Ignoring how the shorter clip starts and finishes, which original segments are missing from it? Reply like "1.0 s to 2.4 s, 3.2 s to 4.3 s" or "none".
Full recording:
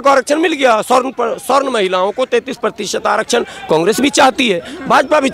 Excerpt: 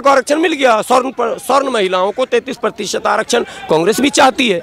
none